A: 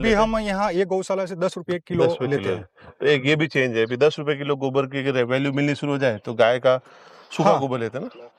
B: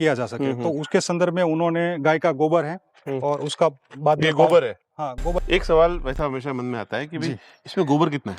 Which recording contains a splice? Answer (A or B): B